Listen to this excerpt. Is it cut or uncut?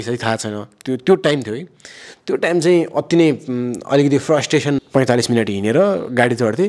cut